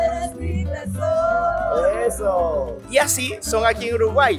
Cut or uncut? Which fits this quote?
uncut